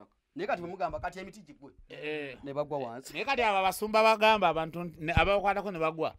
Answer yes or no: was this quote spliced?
no